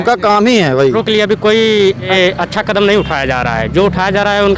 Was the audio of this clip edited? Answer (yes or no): yes